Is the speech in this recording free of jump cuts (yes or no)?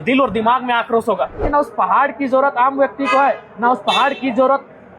no